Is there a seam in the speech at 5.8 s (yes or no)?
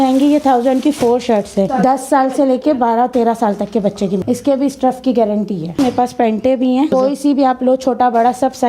yes